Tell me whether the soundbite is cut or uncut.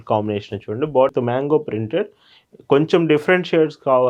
cut